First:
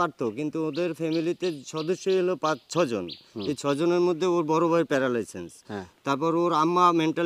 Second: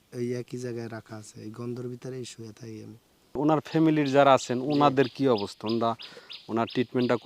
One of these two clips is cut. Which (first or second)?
second